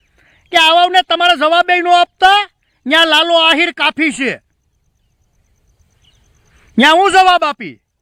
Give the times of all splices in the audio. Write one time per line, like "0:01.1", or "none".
none